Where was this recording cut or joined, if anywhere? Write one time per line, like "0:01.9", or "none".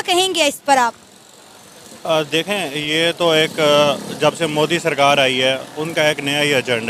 none